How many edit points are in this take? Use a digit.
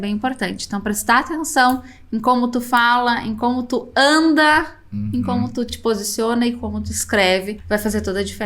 1